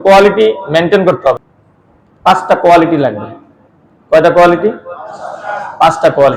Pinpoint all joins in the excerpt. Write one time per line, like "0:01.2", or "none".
0:01.4